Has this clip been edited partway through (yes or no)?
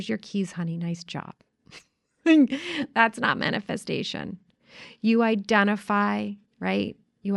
yes